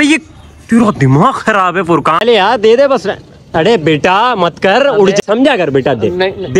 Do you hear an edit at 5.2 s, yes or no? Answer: yes